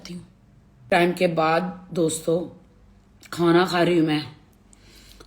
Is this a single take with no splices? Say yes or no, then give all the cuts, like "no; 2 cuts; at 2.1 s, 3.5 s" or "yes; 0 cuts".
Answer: no; 1 cut; at 1.0 s